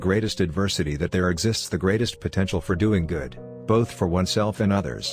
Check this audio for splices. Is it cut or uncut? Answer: uncut